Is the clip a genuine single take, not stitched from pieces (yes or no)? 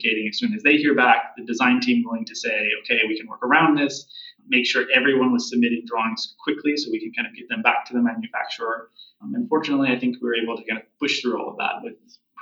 yes